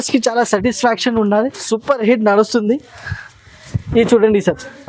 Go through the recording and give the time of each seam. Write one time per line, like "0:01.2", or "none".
0:01.6